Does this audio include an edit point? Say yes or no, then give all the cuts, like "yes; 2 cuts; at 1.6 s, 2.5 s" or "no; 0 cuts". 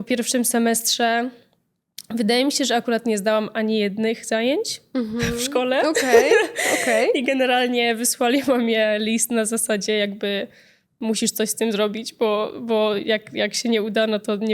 no; 0 cuts